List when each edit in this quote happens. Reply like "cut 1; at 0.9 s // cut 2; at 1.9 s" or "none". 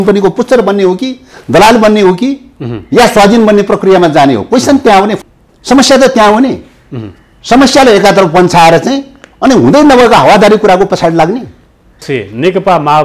cut 1; at 5.1 s // cut 2; at 12.0 s